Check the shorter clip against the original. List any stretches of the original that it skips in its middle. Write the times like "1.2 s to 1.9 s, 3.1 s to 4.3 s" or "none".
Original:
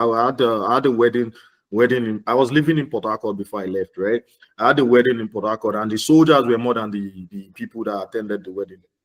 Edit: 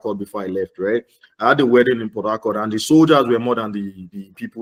none

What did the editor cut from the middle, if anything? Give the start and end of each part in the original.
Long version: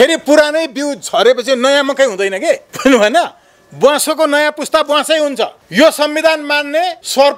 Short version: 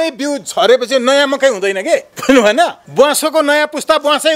3.4 s to 3.7 s

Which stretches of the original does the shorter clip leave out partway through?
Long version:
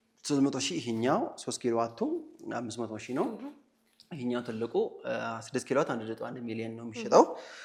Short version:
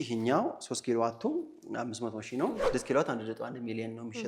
3.4 s to 5.4 s

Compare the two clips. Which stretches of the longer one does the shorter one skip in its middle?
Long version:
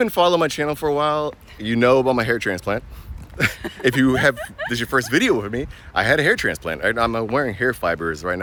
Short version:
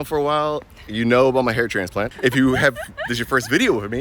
2.8 s to 3.7 s

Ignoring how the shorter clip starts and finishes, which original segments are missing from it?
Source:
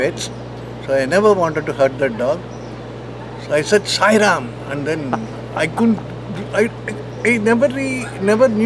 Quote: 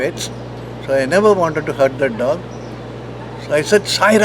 none

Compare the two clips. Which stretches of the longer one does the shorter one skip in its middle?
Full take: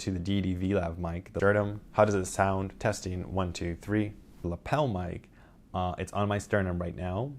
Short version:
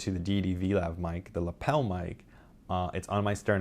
1.3 s to 4.3 s

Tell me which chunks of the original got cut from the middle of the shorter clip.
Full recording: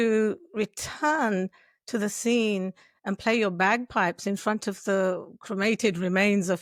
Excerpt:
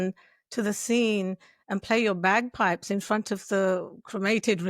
none

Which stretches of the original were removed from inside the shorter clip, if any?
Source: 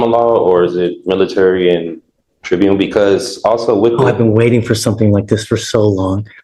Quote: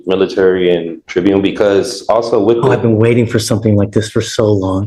2.0 s to 2.3 s

